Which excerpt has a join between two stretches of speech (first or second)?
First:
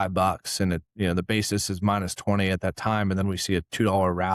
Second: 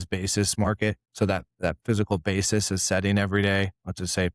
second